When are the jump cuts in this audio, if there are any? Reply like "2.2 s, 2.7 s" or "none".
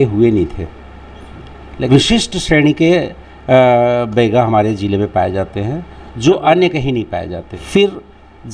1.9 s, 7.5 s

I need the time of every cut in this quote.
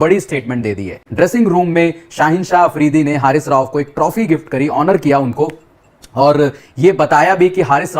1.0 s

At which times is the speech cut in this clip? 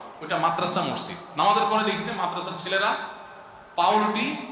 none

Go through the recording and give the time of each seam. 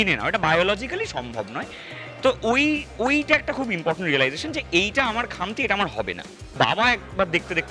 6.5 s

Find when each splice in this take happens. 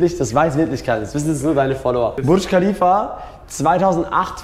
2.2 s

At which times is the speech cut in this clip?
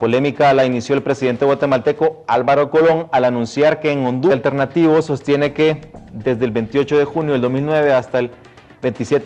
none

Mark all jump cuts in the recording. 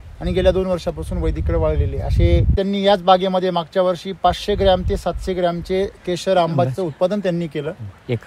2.6 s

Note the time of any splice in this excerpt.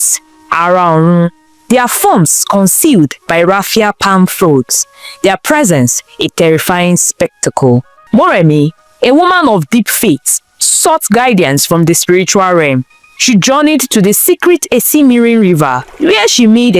8.0 s

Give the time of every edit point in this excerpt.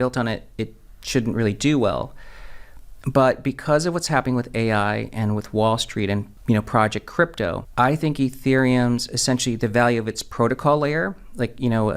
6.3 s, 7.6 s

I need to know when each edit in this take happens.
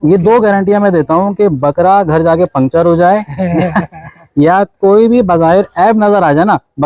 none

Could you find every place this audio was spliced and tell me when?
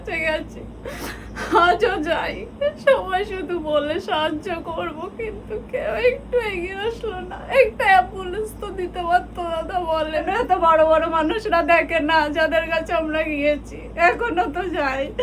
10.2 s

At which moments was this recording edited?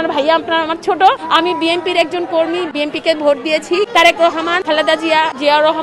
1.2 s, 2.7 s, 3.9 s, 5.0 s

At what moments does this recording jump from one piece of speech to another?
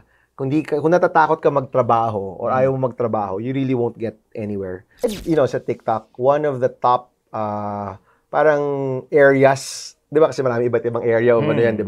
4.9 s

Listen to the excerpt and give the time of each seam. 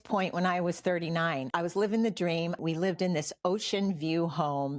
1.5 s, 2.6 s

